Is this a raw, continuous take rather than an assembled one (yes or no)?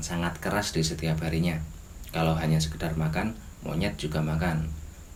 yes